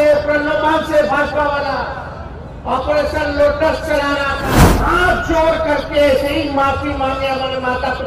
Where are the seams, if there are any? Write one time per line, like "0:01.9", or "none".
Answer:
0:04.7